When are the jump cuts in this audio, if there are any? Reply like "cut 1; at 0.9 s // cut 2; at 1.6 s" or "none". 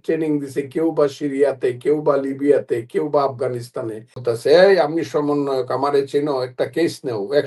cut 1; at 4.2 s